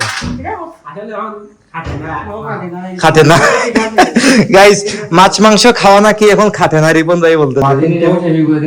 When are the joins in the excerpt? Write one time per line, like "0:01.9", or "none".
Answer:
0:07.6